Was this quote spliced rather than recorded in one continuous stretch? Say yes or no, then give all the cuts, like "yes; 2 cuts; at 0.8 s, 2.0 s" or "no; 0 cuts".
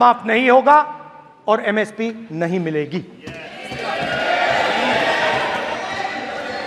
no; 0 cuts